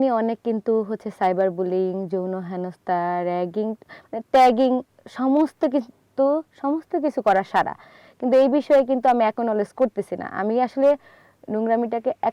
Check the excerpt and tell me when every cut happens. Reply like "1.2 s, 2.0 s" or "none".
none